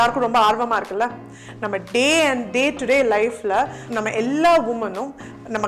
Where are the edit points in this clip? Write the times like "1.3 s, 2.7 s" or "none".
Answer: 3.8 s